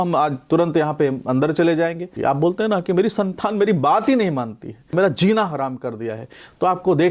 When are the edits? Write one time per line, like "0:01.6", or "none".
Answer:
0:02.1
0:04.9